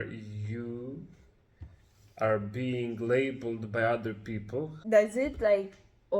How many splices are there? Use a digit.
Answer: 1